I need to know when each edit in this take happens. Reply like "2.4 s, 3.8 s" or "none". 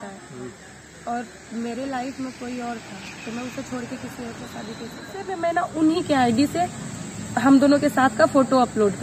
5.3 s